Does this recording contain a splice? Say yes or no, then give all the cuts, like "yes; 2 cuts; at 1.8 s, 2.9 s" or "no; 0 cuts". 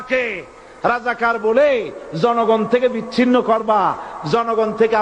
no; 0 cuts